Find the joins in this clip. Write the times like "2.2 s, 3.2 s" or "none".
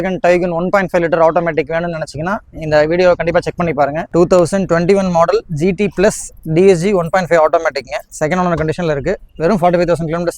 4.0 s